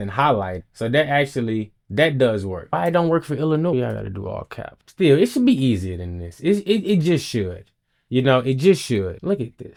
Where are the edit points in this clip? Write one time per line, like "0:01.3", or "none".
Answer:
none